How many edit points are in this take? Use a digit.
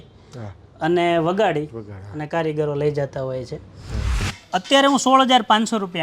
1